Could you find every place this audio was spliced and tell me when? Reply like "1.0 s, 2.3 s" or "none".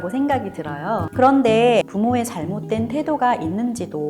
1.1 s, 1.9 s